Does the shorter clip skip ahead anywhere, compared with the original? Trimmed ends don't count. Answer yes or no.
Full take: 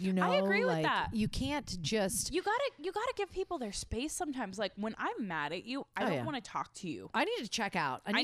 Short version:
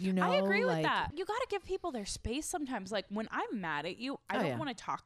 yes